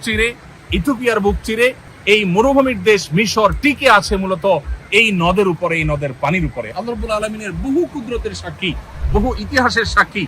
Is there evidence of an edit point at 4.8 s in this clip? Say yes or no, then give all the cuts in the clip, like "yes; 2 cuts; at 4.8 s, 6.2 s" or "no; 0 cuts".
no; 1 cut; at 1.9 s